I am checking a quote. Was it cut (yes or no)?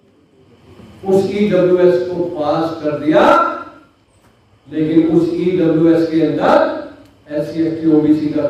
no